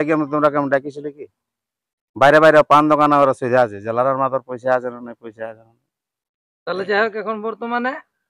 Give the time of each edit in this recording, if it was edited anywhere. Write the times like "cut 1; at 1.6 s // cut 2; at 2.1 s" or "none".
none